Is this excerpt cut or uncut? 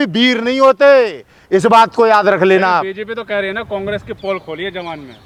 uncut